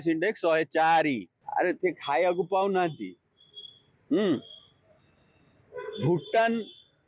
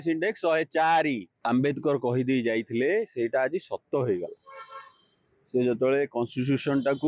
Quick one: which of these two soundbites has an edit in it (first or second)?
second